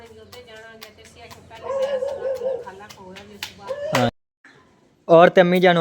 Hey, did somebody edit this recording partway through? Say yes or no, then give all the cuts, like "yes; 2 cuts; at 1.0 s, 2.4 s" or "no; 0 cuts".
yes; 1 cut; at 4.1 s